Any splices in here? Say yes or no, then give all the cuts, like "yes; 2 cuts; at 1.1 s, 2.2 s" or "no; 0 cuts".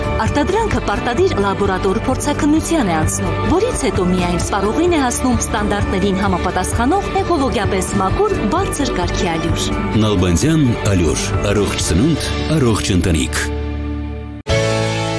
yes; 1 cut; at 14.3 s